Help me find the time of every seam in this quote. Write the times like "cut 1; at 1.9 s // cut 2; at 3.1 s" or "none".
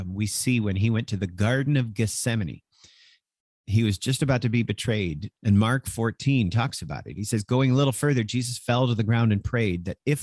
cut 1; at 5.3 s